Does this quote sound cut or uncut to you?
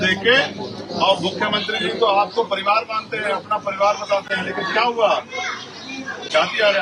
uncut